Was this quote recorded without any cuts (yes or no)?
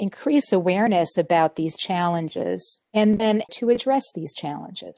no